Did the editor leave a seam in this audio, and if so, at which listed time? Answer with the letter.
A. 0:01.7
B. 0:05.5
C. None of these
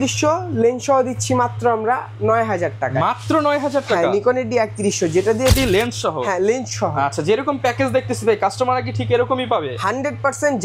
B